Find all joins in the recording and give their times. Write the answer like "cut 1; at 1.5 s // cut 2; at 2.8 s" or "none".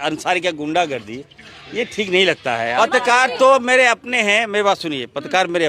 cut 1; at 2.7 s